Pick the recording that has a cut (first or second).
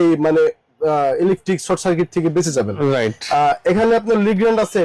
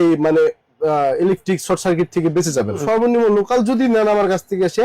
second